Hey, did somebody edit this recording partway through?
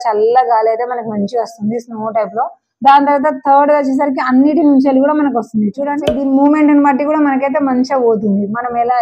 yes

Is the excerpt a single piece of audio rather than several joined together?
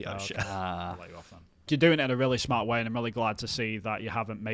no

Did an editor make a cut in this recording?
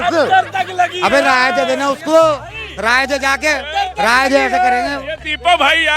no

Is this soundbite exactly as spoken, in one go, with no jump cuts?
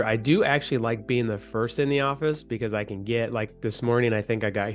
yes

